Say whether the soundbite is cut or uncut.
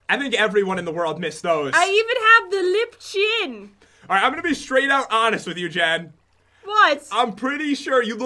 uncut